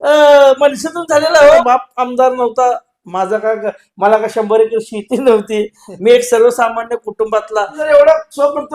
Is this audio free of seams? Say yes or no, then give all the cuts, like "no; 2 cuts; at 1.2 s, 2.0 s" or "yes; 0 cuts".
no; 2 cuts; at 1.6 s, 7.8 s